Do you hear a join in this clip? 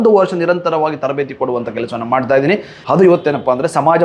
yes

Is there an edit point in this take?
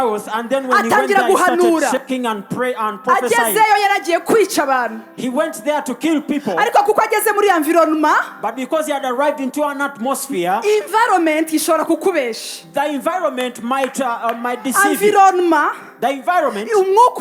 no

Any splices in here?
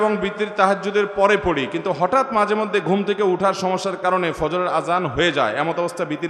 no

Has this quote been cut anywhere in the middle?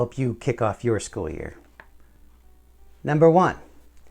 yes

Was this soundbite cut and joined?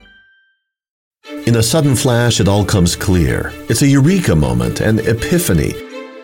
yes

